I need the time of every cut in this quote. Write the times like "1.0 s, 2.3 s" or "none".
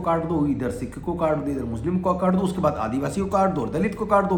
none